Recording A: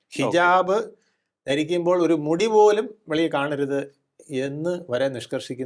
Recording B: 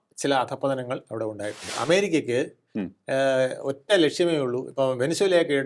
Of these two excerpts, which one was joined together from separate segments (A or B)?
B